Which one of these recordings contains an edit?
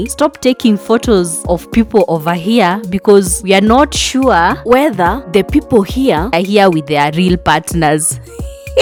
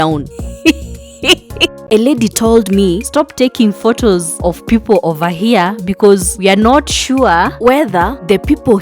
second; 1 cut; at 1.8 s

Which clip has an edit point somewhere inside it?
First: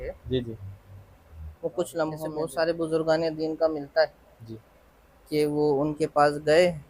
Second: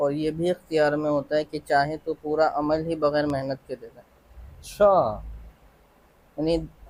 first; 1 cut; at 2.3 s

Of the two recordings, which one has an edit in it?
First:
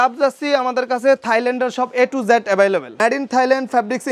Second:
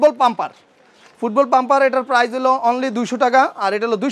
first; 1 cut; at 2.9 s

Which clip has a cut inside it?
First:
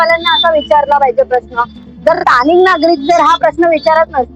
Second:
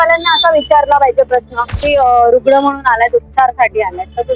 second; 1 cut; at 1.8 s

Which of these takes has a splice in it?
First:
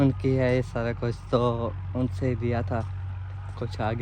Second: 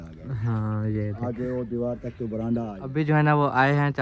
second; 1 cut; at 2.8 s

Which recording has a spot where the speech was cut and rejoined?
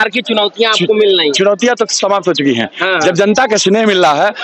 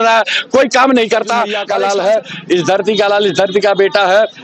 second; 1 cut; at 1.6 s

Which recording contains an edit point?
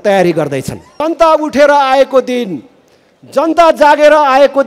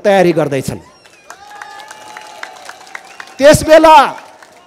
first; 1 cut; at 1.0 s

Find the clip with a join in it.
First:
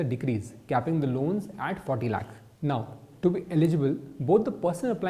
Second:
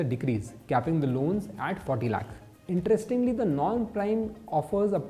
first; 1 cut; at 2.5 s

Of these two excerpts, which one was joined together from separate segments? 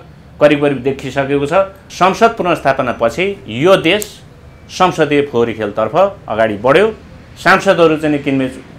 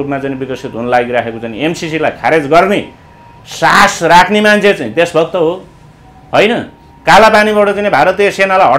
first; 1 cut; at 1.8 s

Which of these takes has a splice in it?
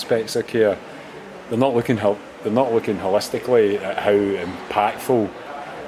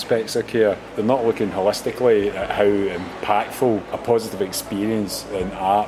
second; 2 cuts; at 0.9 s, 3.9 s

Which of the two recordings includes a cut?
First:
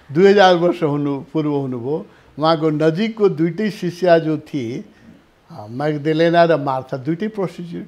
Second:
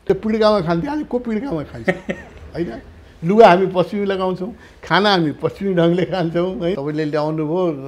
second; 1 cut; at 6.7 s

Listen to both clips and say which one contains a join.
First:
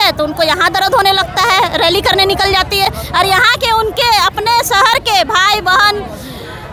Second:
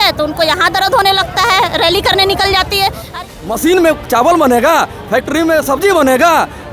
second; 1 cut; at 3.1 s

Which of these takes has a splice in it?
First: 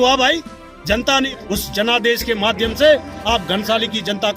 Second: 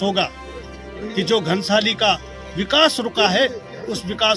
first; 1 cut; at 1.3 s

